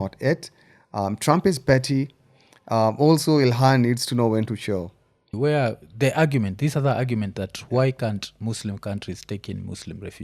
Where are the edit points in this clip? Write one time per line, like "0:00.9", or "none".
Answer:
0:05.3